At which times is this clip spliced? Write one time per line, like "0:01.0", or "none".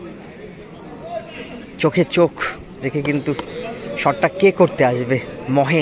0:01.4